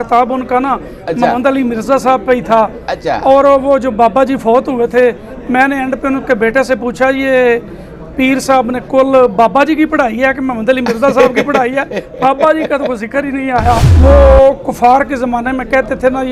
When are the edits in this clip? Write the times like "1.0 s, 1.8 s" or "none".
13.9 s

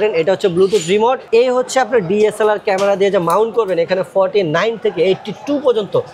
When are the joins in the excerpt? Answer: 1.2 s

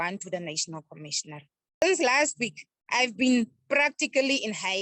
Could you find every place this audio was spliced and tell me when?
1.8 s

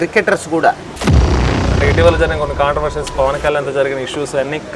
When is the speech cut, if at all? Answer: 1.4 s

